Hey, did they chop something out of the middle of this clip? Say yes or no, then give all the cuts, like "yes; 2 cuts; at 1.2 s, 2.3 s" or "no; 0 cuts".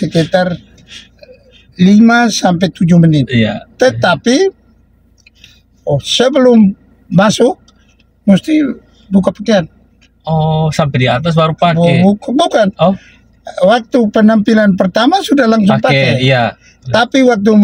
no; 0 cuts